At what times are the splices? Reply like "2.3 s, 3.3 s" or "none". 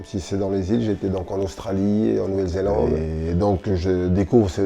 3.1 s